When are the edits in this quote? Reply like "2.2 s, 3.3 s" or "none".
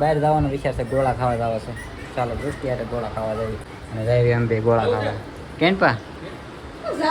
3.7 s